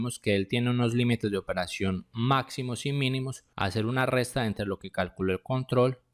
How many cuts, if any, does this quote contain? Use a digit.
1